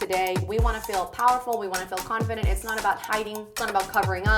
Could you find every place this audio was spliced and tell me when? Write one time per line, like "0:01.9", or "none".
0:03.4